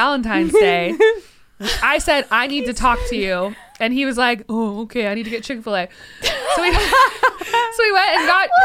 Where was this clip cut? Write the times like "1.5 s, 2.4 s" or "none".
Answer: none